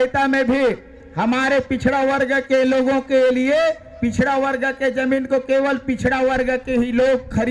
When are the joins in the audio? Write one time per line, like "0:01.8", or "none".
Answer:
none